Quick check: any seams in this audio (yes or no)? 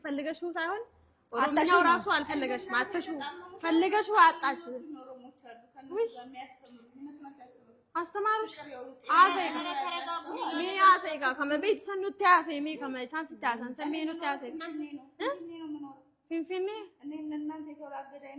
no